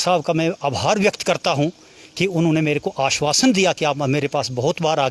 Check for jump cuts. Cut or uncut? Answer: uncut